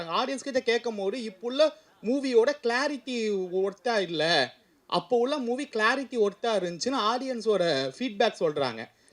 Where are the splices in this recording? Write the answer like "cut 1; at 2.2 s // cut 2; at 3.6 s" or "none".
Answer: none